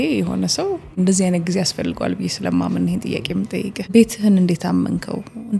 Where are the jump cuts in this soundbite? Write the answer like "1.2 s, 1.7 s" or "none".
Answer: 0.9 s, 3.9 s